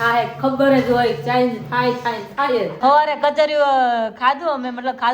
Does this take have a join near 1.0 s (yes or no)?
no